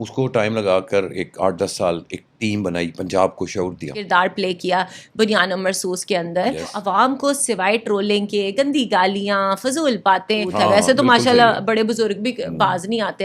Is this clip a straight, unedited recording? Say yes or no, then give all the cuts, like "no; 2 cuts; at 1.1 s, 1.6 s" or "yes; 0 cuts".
no; 3 cuts; at 4.1 s, 6.8 s, 10.5 s